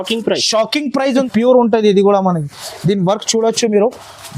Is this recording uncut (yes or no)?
no